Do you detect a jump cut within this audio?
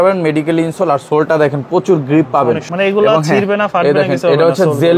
yes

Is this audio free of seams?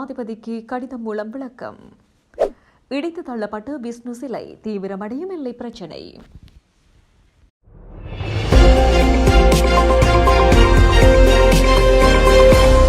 no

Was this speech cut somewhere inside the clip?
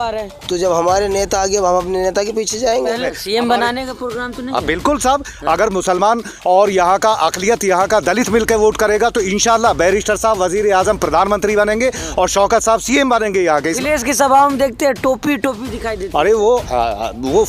yes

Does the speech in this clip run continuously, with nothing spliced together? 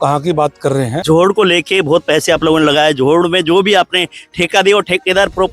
no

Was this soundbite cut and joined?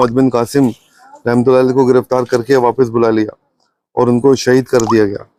no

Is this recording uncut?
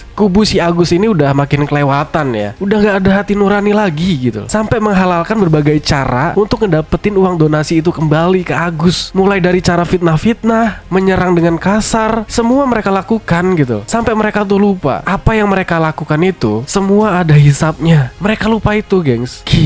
yes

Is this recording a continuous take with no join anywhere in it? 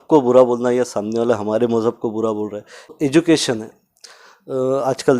no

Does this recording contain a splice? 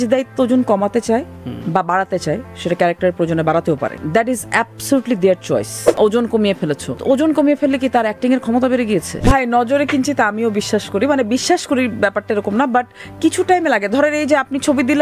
yes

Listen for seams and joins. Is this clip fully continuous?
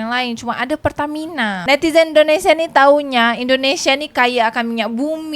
no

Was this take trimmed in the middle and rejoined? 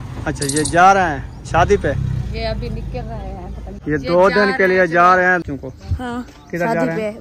yes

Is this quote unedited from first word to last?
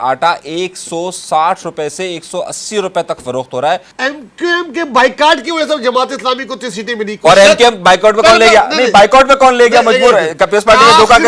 no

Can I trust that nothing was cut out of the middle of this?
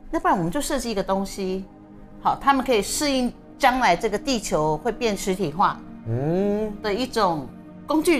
yes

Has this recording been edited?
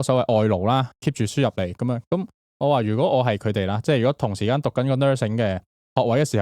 yes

